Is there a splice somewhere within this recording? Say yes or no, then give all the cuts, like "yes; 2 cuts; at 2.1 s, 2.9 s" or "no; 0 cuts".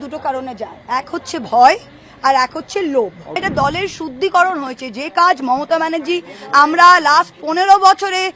yes; 1 cut; at 3.4 s